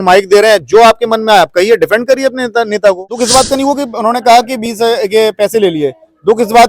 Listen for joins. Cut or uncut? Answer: cut